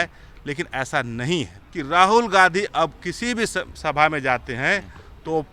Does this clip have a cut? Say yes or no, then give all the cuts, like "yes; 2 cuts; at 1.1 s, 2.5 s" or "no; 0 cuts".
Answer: yes; 1 cut; at 1.6 s